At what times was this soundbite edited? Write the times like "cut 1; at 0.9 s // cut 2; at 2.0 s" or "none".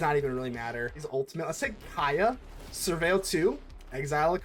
cut 1; at 1.0 s